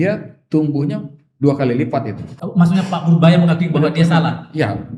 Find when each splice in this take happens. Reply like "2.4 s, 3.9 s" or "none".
2.3 s